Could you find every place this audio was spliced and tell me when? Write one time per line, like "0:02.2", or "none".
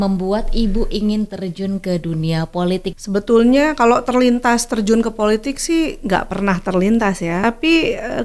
0:03.0
0:07.4